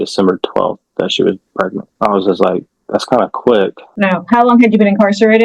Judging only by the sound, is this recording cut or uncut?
cut